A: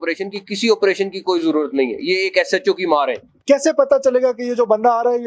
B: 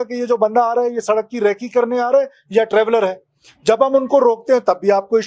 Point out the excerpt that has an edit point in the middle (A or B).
A